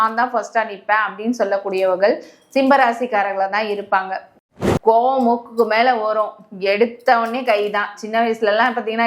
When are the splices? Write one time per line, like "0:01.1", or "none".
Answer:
0:04.4